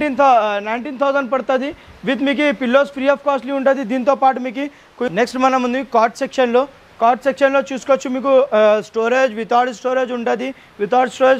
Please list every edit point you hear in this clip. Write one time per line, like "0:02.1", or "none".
0:05.1